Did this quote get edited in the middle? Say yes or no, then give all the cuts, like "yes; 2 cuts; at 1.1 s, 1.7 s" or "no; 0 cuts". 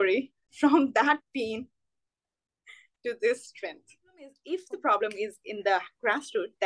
yes; 1 cut; at 4.4 s